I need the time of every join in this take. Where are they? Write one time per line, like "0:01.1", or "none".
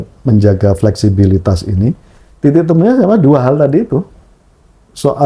none